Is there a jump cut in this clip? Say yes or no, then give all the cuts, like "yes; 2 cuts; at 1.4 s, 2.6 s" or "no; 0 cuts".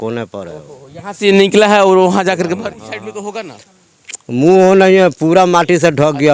yes; 1 cut; at 2.7 s